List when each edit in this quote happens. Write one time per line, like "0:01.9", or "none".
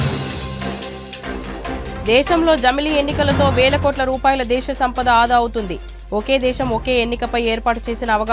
none